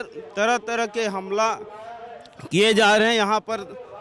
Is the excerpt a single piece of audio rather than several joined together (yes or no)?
yes